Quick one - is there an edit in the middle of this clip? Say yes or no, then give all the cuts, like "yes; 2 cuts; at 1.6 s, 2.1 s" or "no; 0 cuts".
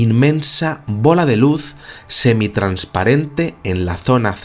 no; 0 cuts